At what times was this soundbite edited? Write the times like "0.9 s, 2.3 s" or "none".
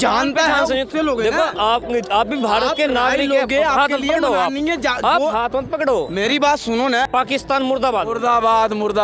7.1 s